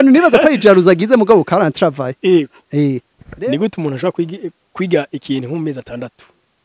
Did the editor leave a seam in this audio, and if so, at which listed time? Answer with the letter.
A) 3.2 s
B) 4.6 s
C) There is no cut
A